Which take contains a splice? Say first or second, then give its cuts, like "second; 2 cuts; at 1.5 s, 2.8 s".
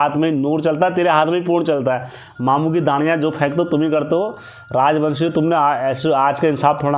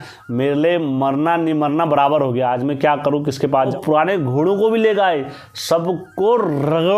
second; 1 cut; at 3.7 s